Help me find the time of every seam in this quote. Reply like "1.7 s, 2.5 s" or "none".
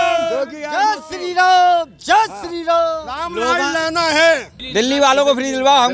4.6 s